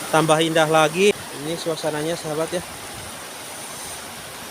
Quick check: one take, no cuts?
no; 1 cut; at 1.1 s

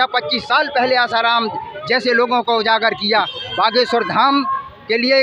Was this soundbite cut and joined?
yes; 1 cut; at 3.4 s

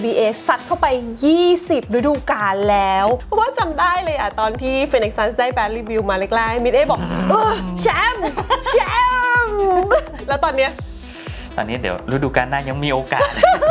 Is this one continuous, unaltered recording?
no; 1 cut; at 3.2 s

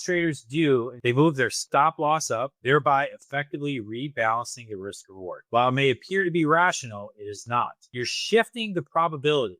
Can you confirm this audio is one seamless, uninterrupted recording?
no; 2 cuts; at 0.9 s, 7.8 s

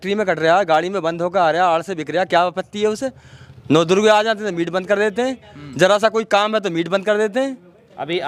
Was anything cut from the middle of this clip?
no; 0 cuts

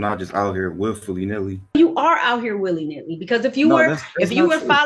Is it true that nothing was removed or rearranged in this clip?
no; 1 cut; at 1.7 s

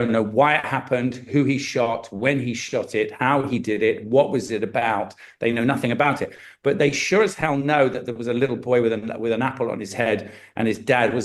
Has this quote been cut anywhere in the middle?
no; 0 cuts

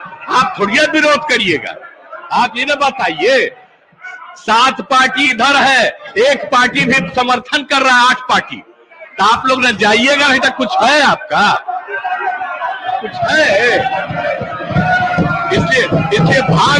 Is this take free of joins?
yes; 0 cuts

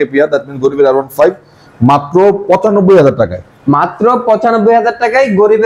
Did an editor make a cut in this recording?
no; 0 cuts

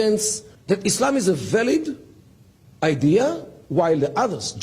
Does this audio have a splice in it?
no; 0 cuts

